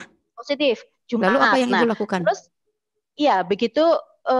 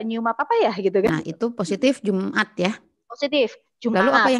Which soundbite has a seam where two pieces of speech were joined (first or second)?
second